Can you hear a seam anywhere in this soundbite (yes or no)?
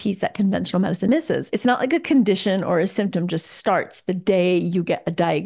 no